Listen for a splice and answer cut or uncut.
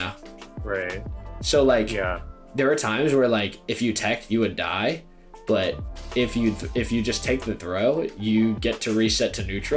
uncut